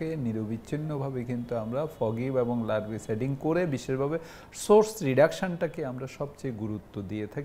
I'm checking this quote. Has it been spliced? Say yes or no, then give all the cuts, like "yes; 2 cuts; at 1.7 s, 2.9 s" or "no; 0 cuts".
no; 0 cuts